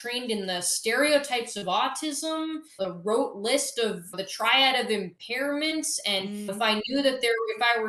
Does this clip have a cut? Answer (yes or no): no